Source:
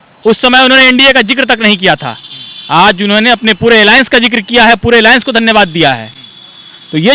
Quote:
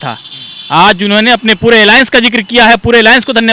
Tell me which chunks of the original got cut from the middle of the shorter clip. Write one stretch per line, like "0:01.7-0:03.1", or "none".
none